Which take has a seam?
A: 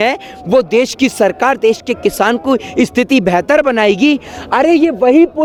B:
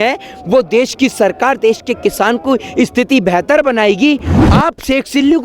B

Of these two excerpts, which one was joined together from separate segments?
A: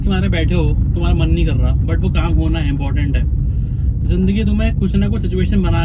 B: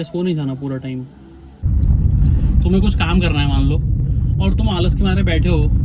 B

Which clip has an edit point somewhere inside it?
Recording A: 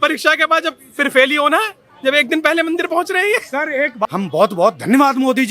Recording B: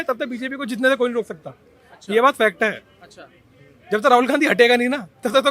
A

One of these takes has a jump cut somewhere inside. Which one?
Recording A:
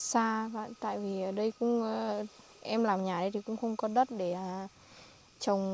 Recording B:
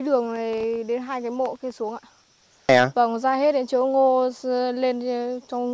B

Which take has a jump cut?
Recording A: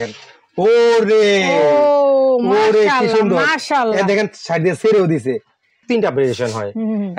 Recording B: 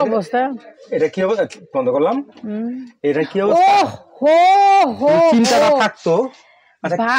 A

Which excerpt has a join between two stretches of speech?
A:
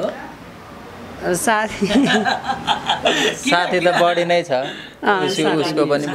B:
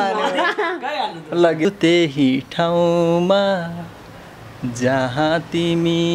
B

